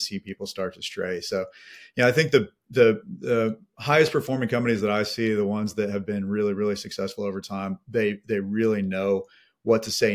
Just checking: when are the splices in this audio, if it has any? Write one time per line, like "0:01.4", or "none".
none